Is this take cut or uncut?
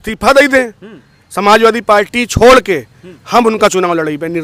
uncut